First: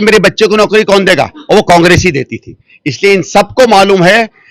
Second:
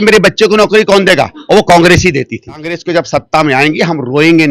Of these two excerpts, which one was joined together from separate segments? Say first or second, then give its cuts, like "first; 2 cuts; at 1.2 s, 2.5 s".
second; 1 cut; at 2.8 s